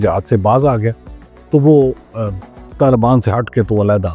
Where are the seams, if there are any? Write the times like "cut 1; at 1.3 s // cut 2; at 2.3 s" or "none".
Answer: none